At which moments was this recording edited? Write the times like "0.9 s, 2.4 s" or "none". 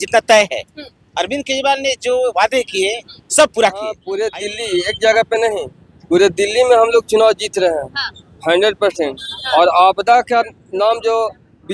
4.0 s